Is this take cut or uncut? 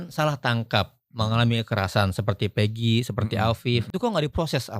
cut